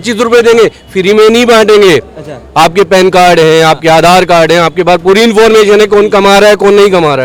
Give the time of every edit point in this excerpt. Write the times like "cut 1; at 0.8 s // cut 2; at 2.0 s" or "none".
none

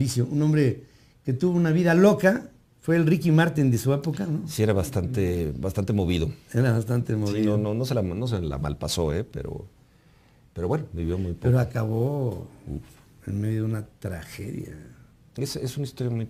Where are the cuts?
none

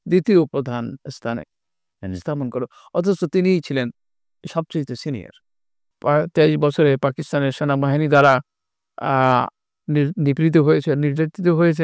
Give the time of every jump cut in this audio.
cut 1; at 5.9 s

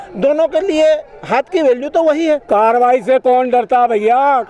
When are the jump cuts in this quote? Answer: cut 1; at 2.4 s

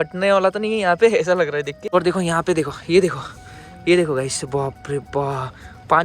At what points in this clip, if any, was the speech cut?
cut 1; at 1.9 s

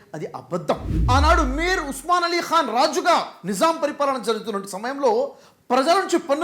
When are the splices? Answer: cut 1; at 0.9 s

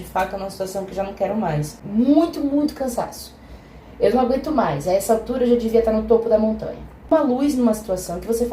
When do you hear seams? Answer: cut 1; at 1.8 s // cut 2; at 7.1 s

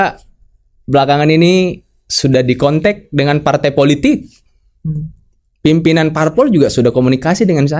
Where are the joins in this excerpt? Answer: none

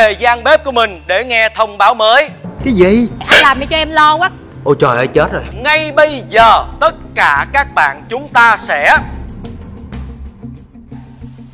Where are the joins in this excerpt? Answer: cut 1; at 5.5 s

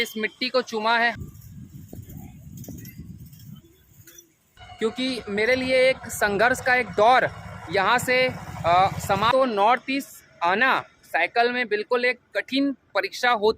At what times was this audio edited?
cut 1; at 1.1 s // cut 2; at 4.6 s // cut 3; at 9.3 s

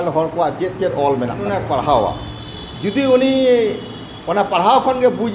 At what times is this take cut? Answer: cut 1; at 1.6 s

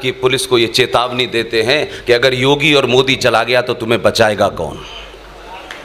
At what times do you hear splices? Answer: none

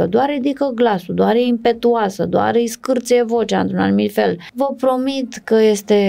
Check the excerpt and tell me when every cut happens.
cut 1; at 4.5 s

